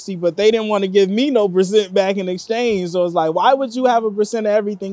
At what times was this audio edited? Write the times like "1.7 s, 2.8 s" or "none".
none